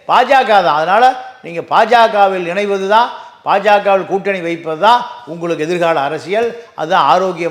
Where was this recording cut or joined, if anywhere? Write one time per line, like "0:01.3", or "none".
none